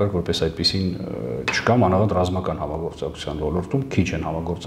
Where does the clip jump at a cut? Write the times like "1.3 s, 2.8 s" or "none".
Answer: none